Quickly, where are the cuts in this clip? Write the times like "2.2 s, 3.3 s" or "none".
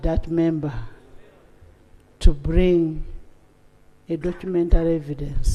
none